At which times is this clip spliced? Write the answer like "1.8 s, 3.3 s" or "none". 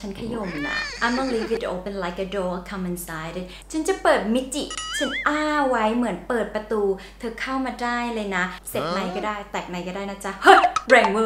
8.7 s